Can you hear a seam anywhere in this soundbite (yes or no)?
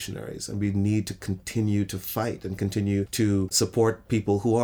yes